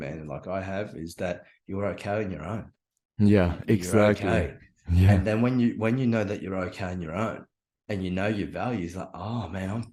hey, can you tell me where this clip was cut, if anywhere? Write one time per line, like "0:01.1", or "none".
none